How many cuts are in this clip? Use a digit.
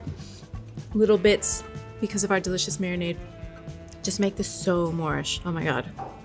1